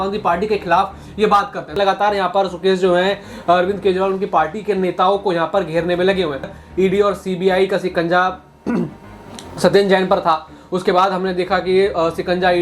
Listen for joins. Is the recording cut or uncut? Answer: cut